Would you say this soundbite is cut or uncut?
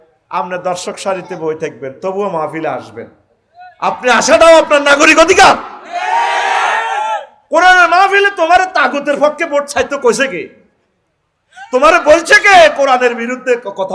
uncut